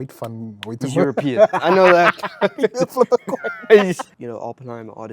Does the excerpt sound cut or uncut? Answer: cut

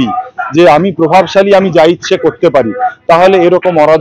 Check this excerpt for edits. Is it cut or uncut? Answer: uncut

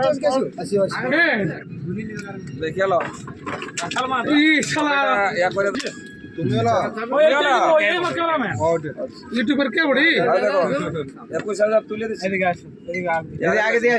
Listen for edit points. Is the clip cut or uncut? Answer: cut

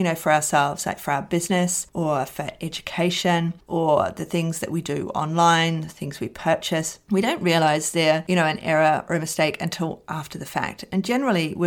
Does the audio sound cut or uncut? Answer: uncut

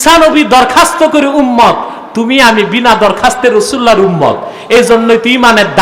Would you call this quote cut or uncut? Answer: uncut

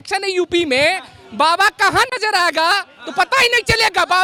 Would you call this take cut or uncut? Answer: uncut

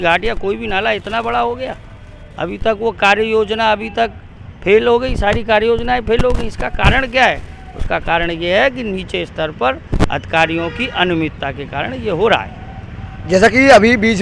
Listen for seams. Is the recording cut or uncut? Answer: uncut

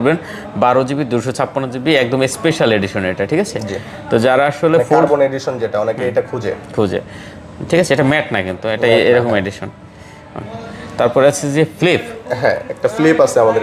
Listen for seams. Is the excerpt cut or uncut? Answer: uncut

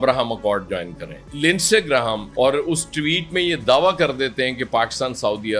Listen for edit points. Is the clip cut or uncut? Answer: cut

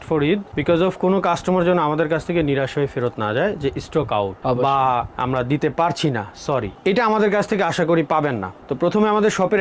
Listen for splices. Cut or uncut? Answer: uncut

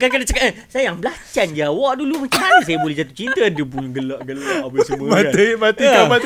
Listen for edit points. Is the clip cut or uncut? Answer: uncut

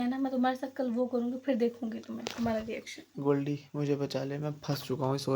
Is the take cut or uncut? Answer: cut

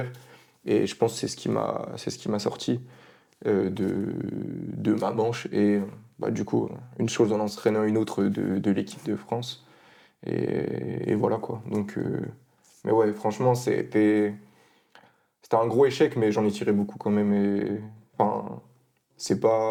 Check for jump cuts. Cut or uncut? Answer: uncut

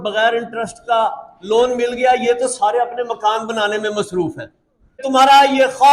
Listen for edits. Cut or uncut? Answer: cut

